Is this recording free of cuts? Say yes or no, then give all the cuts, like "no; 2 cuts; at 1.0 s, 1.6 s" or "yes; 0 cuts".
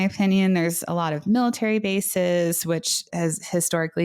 no; 1 cut; at 3.1 s